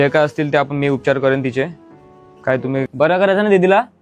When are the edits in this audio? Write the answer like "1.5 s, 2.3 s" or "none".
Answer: 2.9 s